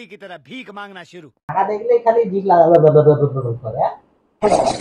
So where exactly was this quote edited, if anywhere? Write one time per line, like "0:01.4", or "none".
0:01.5